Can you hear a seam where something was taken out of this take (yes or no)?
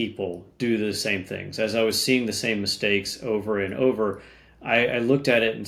no